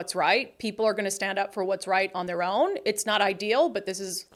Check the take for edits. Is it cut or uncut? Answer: uncut